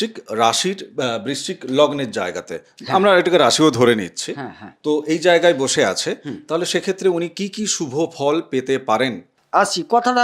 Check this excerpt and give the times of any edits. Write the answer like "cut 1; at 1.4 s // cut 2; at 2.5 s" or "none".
cut 1; at 9.3 s